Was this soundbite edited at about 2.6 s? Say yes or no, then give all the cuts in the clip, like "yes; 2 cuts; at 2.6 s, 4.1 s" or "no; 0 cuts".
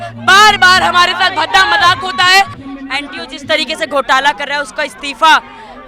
yes; 1 cut; at 2.6 s